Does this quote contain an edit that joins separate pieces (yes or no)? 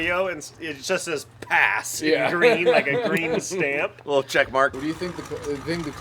yes